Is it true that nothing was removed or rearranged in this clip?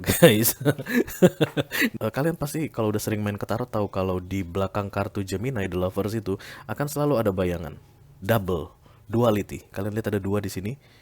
no; 1 cut; at 1.9 s

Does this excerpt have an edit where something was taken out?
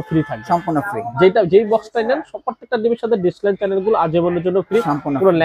no; 0 cuts

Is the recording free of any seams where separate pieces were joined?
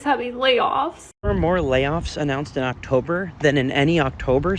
no; 1 cut; at 1.1 s

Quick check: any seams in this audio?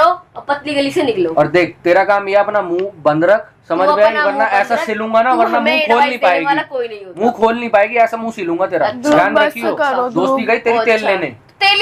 no; 0 cuts

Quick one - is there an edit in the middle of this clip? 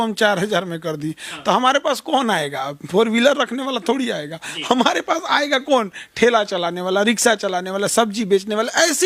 no; 0 cuts

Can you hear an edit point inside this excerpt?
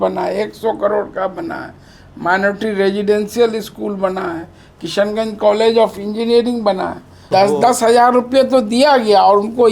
yes; 1 cut; at 7.2 s

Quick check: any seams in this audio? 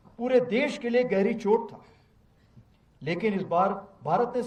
no; 0 cuts

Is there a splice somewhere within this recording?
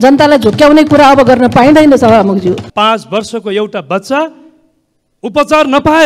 yes; 1 cut; at 2.7 s

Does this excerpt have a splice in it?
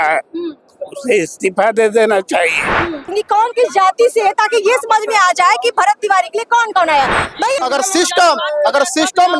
yes; 2 cuts; at 3.1 s, 7.5 s

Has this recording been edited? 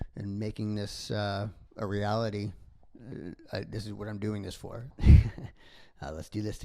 yes; 1 cut; at 4.9 s

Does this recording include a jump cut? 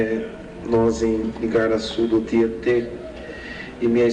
yes; 1 cut; at 3.2 s

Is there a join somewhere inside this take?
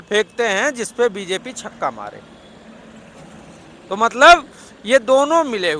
no; 0 cuts

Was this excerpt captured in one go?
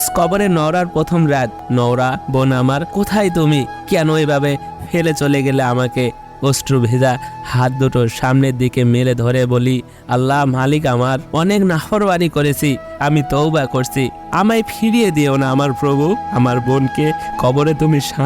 no; 1 cut; at 1.6 s

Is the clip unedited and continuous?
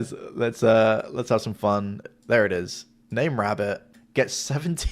no; 2 cuts; at 2.1 s, 3.9 s

